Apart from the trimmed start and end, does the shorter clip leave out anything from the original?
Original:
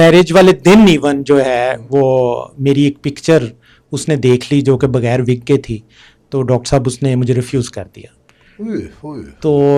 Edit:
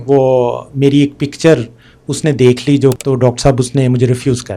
yes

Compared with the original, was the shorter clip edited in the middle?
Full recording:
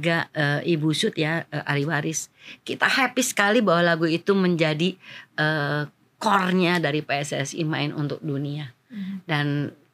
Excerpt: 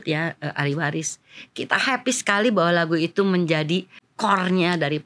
yes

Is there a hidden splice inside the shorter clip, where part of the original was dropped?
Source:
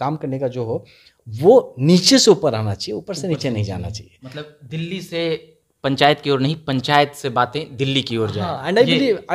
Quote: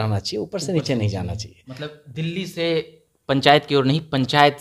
no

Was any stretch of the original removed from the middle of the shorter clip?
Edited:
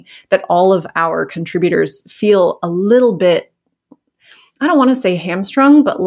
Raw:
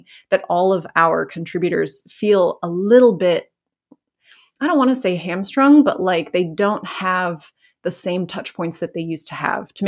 no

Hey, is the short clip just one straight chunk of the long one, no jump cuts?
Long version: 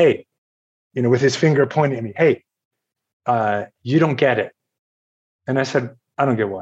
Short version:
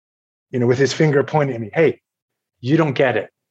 no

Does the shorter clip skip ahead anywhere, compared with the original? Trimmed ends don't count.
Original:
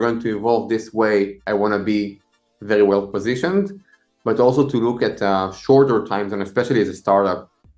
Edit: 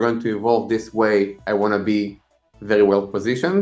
no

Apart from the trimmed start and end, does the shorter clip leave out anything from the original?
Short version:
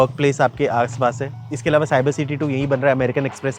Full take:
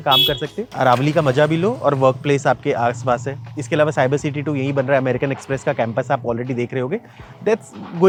no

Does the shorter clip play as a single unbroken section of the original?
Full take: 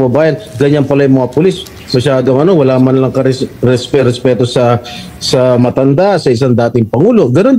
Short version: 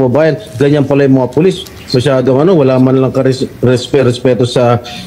yes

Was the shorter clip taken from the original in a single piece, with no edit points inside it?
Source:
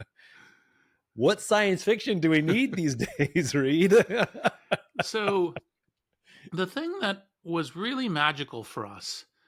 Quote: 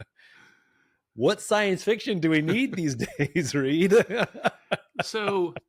yes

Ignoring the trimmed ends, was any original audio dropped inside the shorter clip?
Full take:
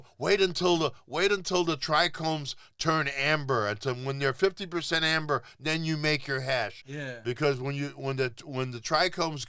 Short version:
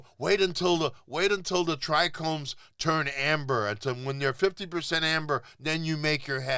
no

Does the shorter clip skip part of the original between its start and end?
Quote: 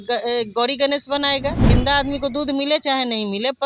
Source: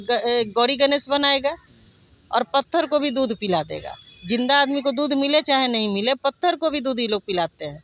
yes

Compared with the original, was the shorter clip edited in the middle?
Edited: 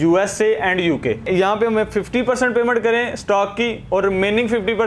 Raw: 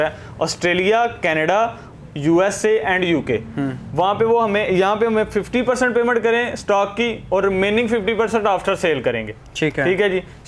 yes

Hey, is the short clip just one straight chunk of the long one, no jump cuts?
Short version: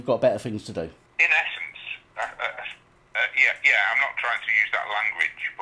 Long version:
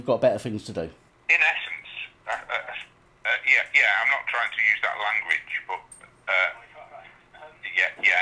no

